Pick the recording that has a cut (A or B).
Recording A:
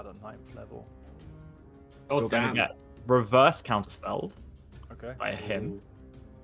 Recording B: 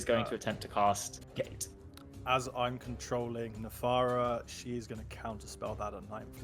B